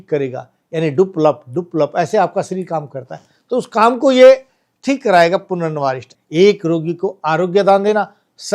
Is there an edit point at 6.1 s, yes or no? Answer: yes